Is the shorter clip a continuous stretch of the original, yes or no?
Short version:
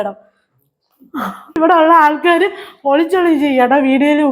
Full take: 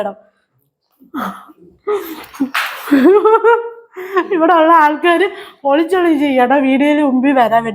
no